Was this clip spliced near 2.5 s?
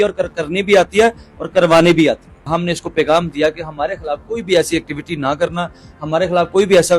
yes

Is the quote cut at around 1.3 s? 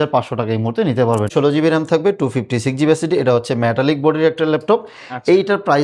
yes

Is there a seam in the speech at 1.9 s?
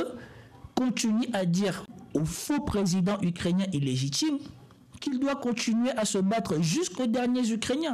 yes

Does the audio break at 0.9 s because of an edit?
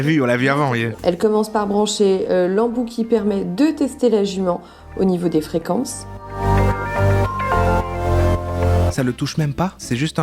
yes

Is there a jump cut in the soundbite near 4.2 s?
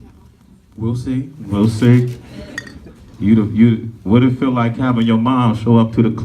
yes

